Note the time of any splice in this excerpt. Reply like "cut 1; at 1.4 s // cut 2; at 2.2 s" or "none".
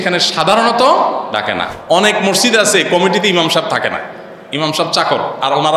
cut 1; at 1.7 s